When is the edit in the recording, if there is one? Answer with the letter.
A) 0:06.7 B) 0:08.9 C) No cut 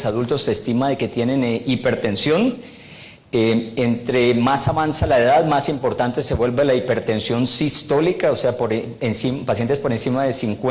B